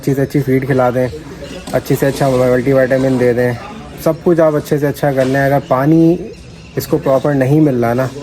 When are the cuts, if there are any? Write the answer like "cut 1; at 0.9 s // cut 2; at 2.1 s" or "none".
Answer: none